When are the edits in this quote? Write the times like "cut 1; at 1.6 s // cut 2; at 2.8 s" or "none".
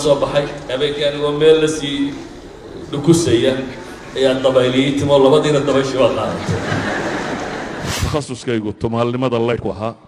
cut 1; at 7.9 s